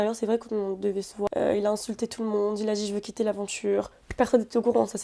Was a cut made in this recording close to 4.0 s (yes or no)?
yes